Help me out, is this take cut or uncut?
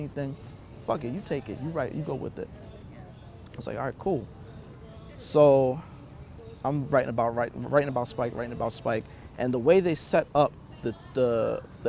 uncut